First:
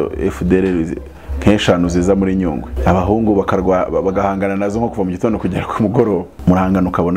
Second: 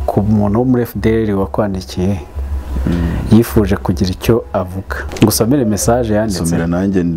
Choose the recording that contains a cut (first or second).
first